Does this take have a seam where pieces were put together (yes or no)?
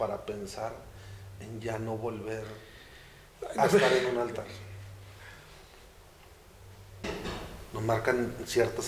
yes